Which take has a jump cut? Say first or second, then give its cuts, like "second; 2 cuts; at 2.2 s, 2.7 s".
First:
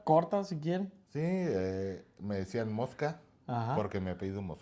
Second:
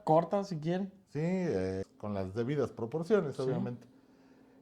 second; 1 cut; at 1.8 s